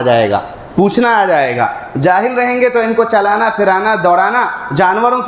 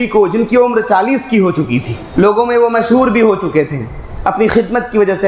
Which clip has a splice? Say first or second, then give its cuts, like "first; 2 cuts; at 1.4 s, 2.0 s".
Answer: second; 1 cut; at 2.0 s